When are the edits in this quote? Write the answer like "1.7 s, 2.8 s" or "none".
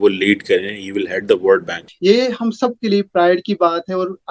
1.9 s